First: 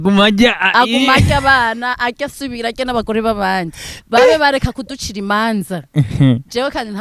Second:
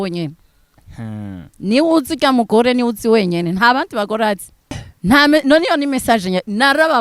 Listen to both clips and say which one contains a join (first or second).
second